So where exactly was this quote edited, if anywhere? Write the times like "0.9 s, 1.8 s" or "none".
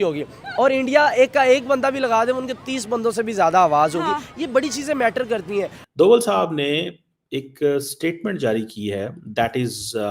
5.8 s

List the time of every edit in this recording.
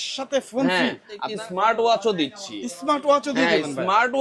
1.3 s

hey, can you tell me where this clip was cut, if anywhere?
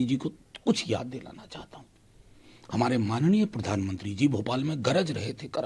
none

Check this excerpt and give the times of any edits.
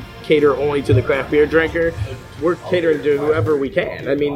2.1 s

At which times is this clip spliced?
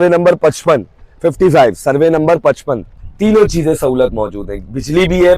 3.1 s

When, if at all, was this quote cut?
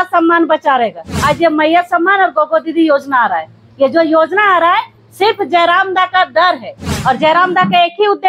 1.1 s, 6.9 s

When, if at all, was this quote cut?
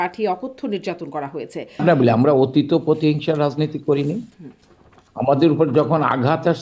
1.8 s

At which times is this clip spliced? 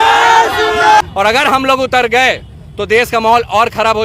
1.0 s

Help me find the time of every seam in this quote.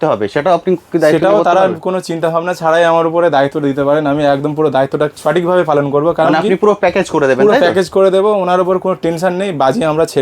none

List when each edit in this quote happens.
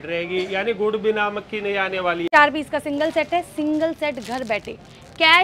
2.3 s

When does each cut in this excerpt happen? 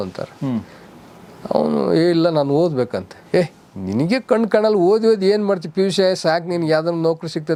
none

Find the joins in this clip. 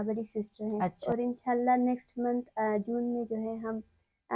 1.0 s

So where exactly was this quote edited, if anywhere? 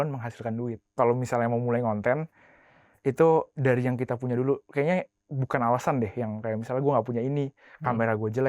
0.9 s

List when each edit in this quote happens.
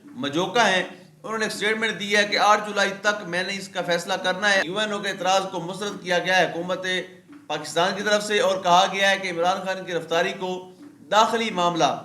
4.6 s

